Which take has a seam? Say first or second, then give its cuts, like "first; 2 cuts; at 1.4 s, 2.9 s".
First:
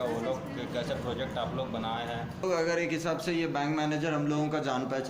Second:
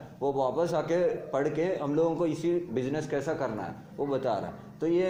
first; 1 cut; at 2.4 s